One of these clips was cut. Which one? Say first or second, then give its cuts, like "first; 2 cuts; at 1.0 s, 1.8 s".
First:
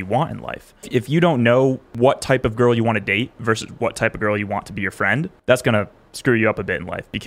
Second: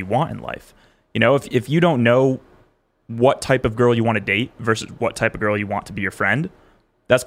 first; 3 cuts; at 0.9 s, 1.9 s, 5.3 s